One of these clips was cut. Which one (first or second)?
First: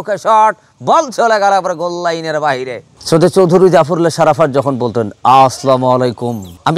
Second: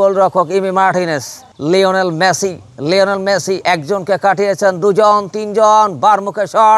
first